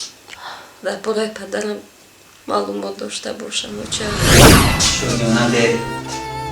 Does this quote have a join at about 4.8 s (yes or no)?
yes